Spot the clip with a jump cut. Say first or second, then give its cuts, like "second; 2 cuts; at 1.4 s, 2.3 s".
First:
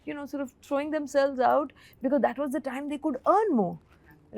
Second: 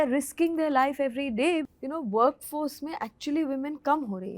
second; 1 cut; at 1.7 s